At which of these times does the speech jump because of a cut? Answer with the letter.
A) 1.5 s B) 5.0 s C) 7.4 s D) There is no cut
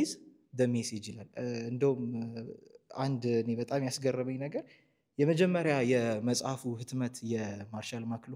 D